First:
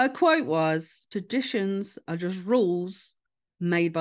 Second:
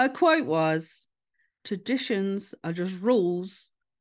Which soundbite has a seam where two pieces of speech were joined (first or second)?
first